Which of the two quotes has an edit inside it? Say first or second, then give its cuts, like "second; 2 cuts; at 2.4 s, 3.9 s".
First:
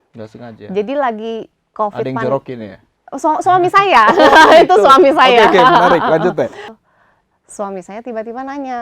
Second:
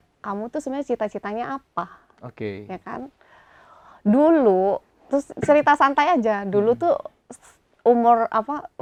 first; 1 cut; at 6.6 s